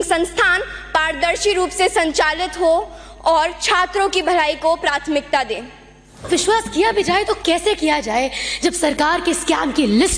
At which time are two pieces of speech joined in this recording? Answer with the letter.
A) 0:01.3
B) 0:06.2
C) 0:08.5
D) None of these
B